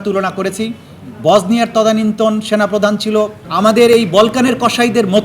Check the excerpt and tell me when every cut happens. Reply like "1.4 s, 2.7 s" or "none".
3.4 s